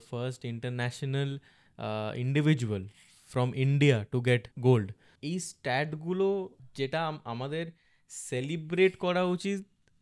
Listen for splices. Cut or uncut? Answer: cut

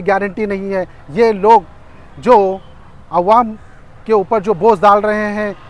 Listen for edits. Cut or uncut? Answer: uncut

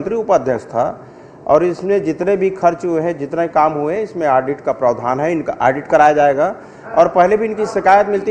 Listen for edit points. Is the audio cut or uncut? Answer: uncut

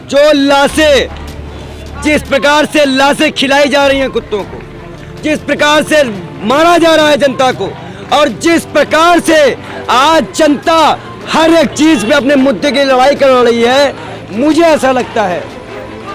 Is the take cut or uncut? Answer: uncut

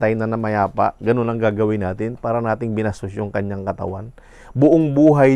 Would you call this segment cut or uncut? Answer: uncut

